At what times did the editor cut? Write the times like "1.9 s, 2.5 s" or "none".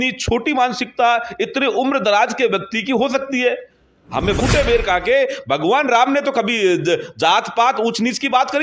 4.4 s